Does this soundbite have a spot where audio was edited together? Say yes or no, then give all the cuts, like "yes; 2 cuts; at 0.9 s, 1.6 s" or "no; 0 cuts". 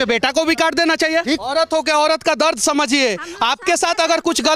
yes; 1 cut; at 1.5 s